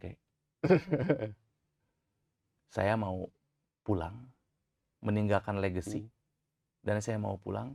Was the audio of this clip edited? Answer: no; 0 cuts

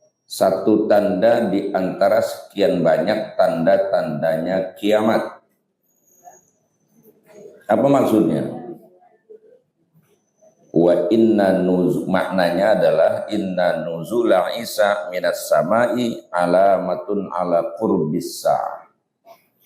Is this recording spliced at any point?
no; 0 cuts

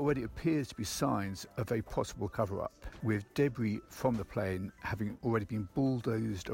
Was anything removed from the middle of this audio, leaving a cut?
yes; 2 cuts; at 2.3 s, 3.9 s

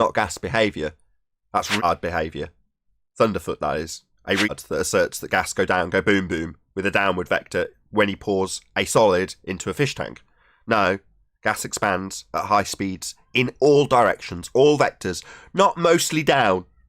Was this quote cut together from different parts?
yes; 2 cuts; at 1.8 s, 4.5 s

